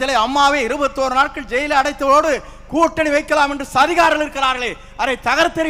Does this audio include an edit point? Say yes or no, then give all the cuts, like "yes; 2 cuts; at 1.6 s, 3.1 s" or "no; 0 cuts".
no; 0 cuts